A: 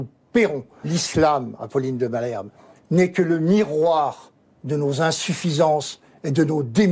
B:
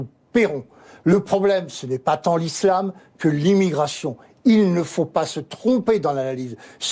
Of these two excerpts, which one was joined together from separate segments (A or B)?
A